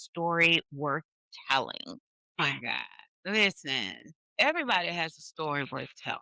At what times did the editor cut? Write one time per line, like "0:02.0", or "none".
none